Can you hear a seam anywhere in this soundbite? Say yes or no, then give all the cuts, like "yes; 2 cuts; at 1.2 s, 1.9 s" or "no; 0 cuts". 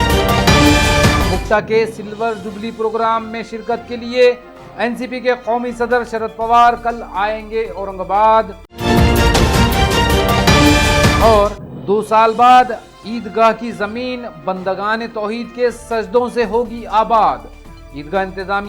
no; 0 cuts